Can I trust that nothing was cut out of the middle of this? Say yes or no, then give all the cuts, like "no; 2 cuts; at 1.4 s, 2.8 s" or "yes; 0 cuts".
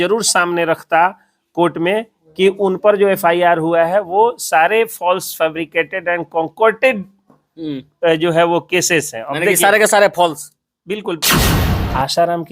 no; 1 cut; at 11.6 s